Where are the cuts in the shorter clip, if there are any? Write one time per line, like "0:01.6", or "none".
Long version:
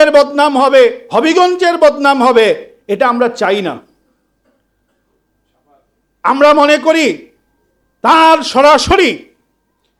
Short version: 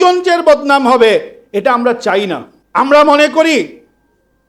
0:02.5

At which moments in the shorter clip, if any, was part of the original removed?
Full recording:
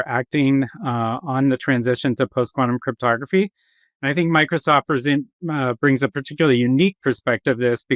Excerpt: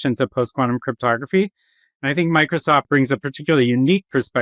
0:02.9

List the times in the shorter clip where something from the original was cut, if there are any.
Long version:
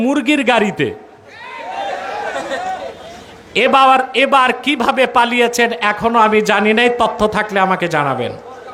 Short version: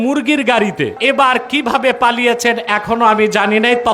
0:01.0

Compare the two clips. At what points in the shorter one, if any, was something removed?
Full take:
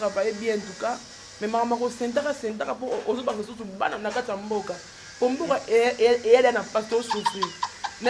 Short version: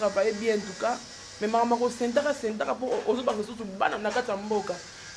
none

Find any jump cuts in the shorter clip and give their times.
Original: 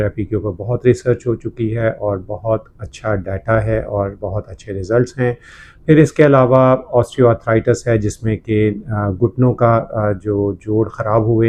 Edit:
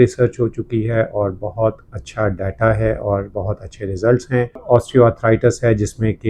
0:04.6

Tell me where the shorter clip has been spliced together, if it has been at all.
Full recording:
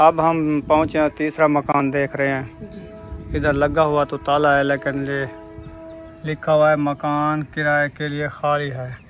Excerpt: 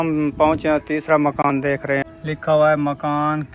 0:02.1

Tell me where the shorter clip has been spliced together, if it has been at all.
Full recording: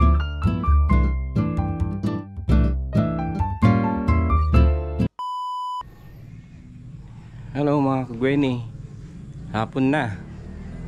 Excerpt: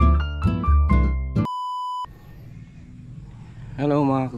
0:01.5

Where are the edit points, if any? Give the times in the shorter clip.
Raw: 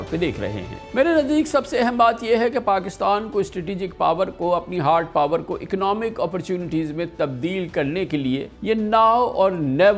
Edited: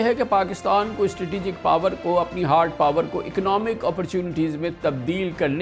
none

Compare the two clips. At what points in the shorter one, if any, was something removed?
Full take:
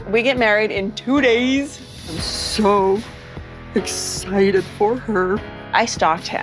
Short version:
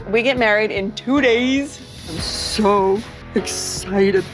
0:03.1

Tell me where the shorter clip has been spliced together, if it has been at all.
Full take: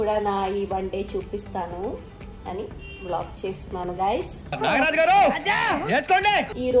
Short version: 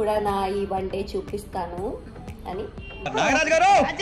0:02.9

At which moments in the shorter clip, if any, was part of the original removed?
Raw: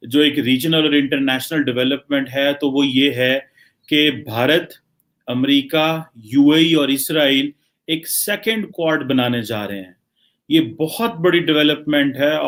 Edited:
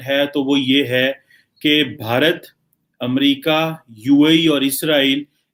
none

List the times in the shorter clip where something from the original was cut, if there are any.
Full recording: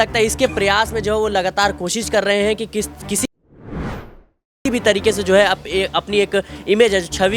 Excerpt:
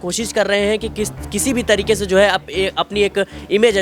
0:01.4

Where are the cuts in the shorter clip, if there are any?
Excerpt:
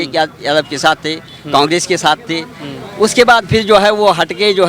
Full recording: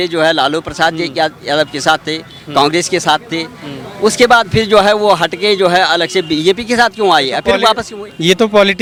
none

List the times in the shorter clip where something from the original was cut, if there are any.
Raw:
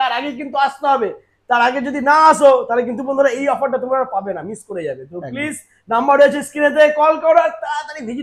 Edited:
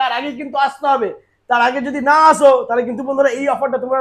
none

